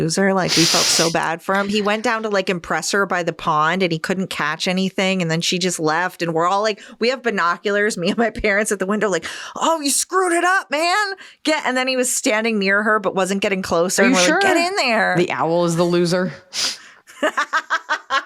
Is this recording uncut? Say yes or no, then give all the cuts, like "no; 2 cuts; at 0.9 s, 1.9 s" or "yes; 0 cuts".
yes; 0 cuts